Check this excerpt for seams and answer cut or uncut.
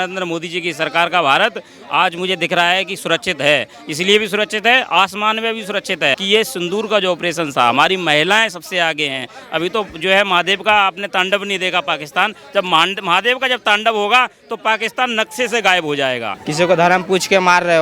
cut